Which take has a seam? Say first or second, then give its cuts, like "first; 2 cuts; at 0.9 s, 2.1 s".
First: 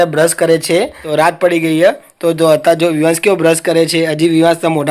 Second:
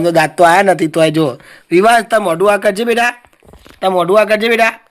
first; 1 cut; at 1.1 s